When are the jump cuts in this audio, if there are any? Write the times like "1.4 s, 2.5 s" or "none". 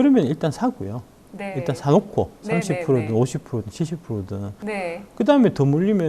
4.6 s